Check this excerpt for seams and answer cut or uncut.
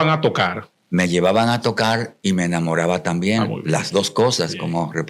uncut